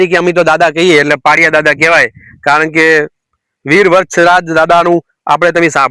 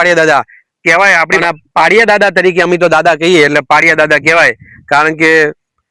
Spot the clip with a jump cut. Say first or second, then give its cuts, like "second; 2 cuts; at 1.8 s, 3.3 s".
second; 1 cut; at 1.4 s